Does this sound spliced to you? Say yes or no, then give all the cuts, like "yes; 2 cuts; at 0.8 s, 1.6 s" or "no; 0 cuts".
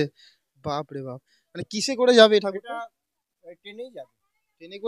no; 0 cuts